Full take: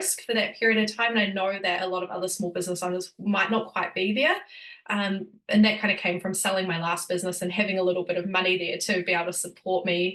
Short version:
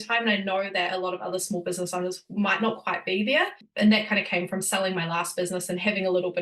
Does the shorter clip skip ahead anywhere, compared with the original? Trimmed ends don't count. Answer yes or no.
yes